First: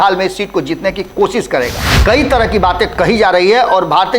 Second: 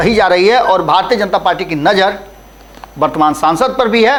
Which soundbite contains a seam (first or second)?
first